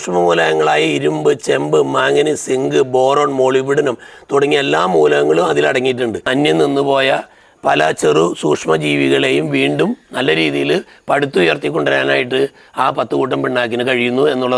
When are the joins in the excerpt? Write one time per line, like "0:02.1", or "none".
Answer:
0:06.3